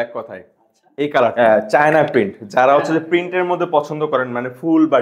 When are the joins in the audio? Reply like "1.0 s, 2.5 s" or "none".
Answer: 1.3 s